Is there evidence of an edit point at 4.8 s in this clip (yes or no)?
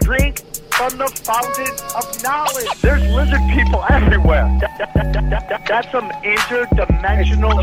no